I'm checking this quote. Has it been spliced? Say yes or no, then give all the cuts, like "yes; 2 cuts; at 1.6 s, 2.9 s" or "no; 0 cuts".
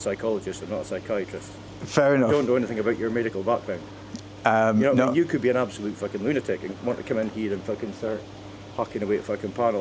no; 0 cuts